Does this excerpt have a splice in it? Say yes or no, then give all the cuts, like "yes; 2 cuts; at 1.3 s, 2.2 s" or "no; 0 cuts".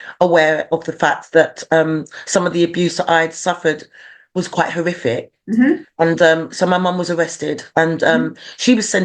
no; 0 cuts